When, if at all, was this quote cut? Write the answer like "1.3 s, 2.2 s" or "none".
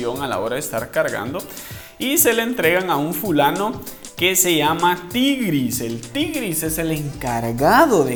none